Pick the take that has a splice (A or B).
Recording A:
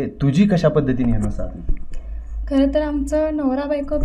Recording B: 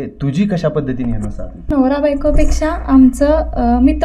B